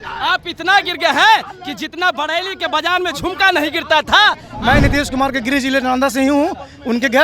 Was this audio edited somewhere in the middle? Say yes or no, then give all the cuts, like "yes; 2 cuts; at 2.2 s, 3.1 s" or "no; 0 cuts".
yes; 1 cut; at 4.5 s